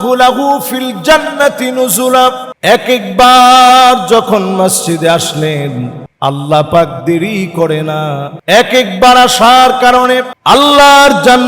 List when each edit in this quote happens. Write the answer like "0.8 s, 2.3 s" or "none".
2.5 s, 6.0 s, 8.3 s, 10.3 s